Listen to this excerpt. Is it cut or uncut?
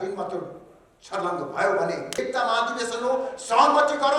cut